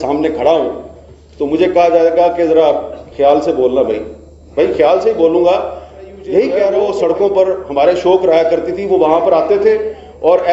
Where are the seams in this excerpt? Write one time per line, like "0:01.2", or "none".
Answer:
0:06.7